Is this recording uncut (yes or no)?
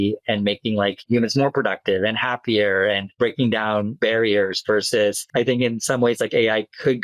no